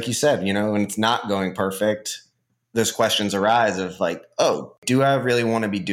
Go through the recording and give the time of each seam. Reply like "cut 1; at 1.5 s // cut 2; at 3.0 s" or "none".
cut 1; at 4.8 s